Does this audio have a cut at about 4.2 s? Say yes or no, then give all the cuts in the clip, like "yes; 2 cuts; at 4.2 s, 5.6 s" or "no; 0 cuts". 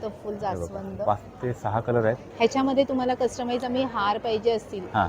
no; 1 cut; at 2.3 s